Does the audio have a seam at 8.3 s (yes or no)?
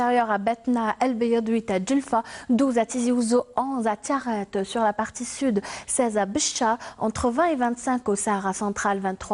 yes